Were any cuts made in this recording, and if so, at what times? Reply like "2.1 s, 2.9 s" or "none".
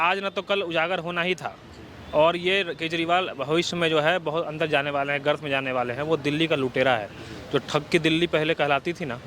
none